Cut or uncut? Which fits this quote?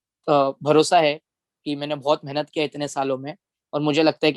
uncut